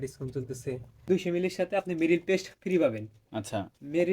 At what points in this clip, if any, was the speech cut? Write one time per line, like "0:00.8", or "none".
0:01.0